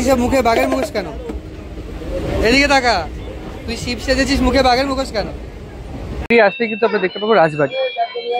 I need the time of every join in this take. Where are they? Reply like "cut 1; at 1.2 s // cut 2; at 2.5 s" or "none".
cut 1; at 6.2 s